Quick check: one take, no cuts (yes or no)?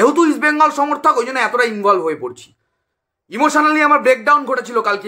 yes